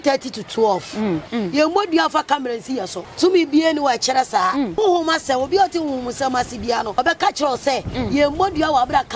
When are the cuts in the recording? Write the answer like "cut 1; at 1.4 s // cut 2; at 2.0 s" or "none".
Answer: cut 1; at 1.3 s // cut 2; at 3.0 s // cut 3; at 4.8 s // cut 4; at 7.0 s

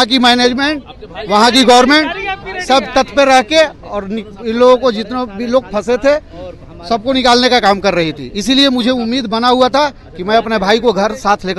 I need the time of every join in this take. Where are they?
none

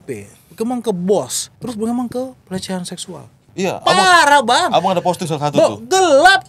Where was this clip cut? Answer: cut 1; at 1.4 s // cut 2; at 3.5 s

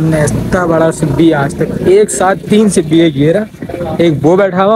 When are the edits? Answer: none

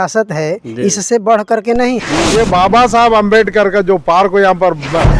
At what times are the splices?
cut 1; at 2.1 s

